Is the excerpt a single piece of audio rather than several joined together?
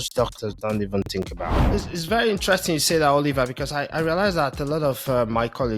no; 1 cut; at 1.6 s

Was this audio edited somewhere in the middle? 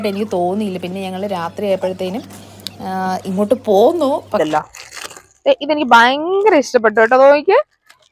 yes; 1 cut; at 4.4 s

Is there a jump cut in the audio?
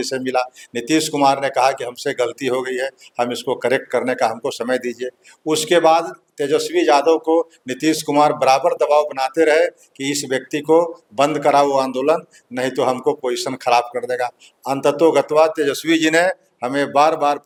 no; 0 cuts

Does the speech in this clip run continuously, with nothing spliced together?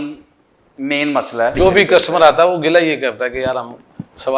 no; 1 cut; at 1.6 s

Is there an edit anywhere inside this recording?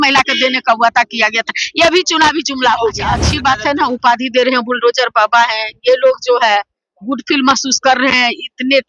yes; 1 cut; at 3.3 s

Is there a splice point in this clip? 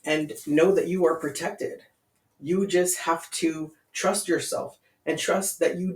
no; 0 cuts

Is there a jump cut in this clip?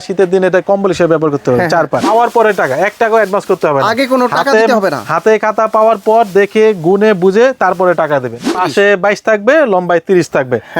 yes; 2 cuts; at 2.0 s, 8.5 s

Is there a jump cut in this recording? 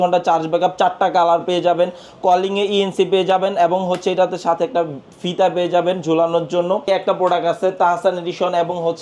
yes; 1 cut; at 6.9 s

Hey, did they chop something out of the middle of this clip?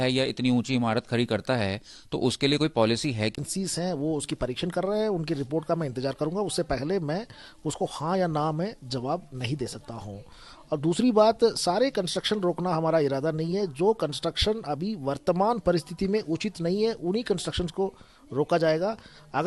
yes; 1 cut; at 3.3 s

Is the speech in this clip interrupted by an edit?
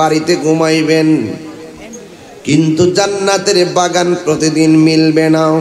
no; 0 cuts

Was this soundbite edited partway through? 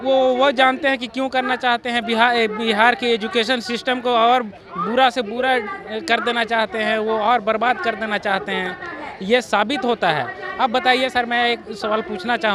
no; 0 cuts

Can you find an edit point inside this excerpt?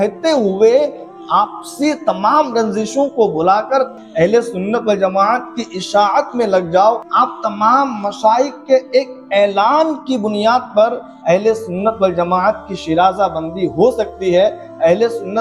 yes; 2 cuts; at 3.9 s, 7.0 s

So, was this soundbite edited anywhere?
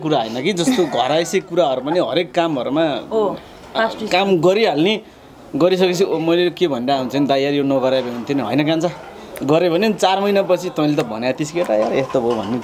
no; 0 cuts

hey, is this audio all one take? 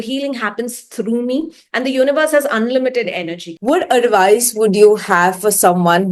no; 1 cut; at 3.5 s

